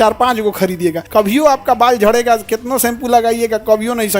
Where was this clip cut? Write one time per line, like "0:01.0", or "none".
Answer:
0:01.0